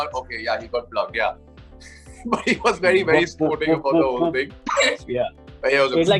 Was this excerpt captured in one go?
yes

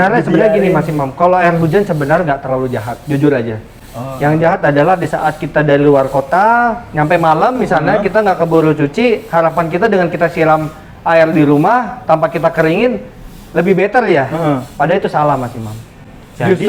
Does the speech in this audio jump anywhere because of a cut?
no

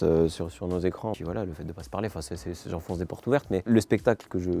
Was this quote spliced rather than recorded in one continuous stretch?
yes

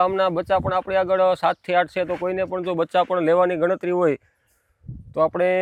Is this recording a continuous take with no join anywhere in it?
yes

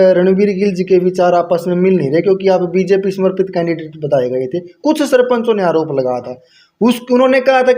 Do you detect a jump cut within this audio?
no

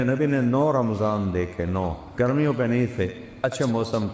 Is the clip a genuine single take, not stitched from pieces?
no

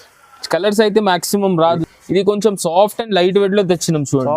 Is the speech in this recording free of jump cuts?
no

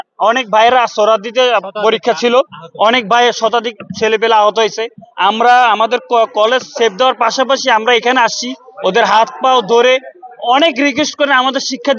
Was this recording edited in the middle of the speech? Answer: no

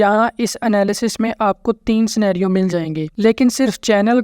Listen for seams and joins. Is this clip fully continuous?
no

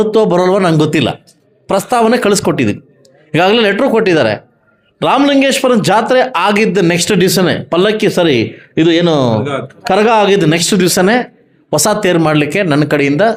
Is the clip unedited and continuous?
yes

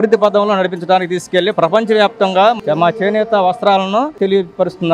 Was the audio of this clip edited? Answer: yes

